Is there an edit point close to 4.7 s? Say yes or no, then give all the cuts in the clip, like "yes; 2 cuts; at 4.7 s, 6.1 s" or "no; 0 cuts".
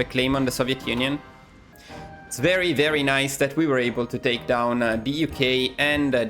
no; 1 cut; at 1.7 s